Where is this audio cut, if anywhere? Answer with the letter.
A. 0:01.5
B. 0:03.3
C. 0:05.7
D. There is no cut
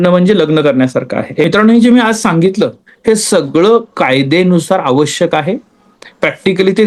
A